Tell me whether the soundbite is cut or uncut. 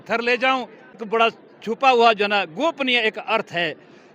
cut